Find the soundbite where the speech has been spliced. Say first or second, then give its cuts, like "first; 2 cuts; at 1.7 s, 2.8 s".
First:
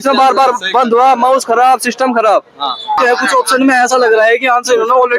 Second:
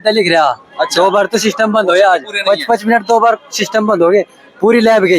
first; 1 cut; at 3.0 s